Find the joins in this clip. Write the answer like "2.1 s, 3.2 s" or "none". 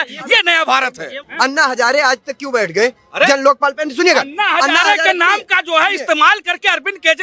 1.2 s